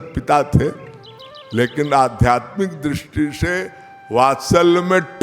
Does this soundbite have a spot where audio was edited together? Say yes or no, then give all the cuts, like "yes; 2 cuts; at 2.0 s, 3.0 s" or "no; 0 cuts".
no; 0 cuts